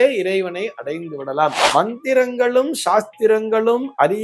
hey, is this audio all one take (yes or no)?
no